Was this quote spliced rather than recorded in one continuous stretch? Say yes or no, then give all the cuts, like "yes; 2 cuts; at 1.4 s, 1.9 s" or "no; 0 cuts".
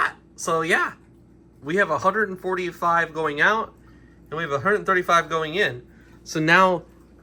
no; 0 cuts